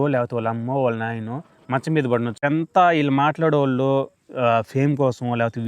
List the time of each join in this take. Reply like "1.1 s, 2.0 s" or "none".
2.4 s